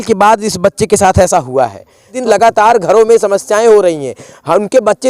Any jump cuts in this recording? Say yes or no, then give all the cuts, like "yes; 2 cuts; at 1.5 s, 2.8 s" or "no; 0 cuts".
yes; 1 cut; at 2.2 s